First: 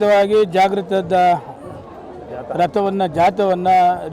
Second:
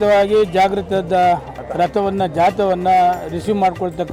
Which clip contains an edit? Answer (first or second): second